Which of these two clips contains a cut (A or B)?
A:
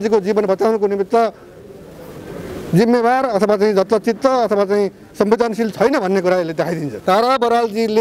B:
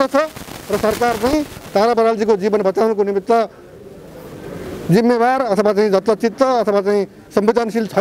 A